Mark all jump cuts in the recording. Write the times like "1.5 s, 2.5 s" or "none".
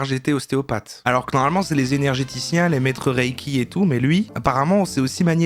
none